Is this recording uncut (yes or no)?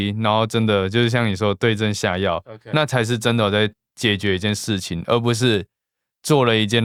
yes